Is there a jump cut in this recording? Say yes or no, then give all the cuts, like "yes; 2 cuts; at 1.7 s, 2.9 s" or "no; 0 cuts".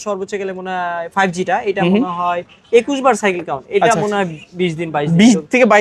no; 0 cuts